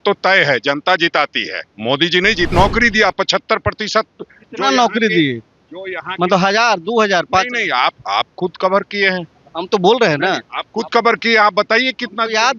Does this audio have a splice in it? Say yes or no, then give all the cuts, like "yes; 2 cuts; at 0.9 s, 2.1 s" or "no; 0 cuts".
yes; 1 cut; at 2.5 s